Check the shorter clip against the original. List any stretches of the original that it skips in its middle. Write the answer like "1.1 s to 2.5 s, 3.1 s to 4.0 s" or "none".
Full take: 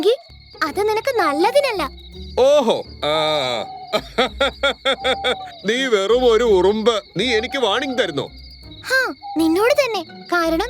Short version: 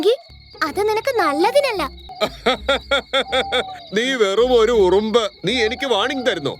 2.0 s to 3.8 s